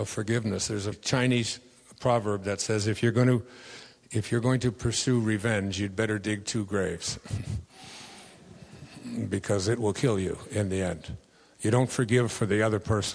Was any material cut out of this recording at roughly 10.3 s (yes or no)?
no